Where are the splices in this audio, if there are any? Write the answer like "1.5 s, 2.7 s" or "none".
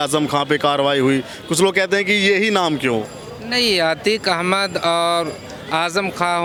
none